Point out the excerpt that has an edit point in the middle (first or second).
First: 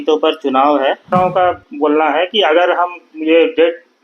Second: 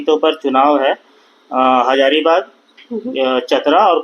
first